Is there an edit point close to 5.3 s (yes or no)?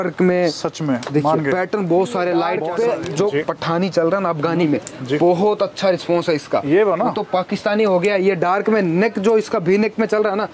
no